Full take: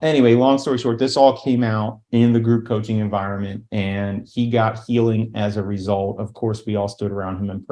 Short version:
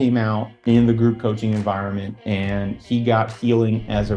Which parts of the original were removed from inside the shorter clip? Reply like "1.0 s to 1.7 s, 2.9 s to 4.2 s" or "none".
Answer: none